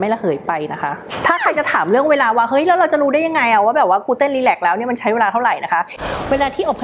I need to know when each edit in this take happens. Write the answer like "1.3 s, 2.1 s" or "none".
1.0 s, 5.9 s